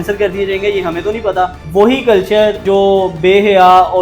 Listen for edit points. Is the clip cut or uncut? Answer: cut